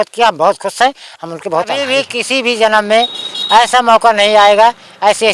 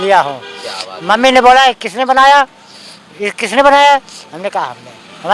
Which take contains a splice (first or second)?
first